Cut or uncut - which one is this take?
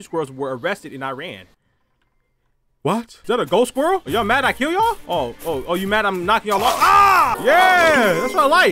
cut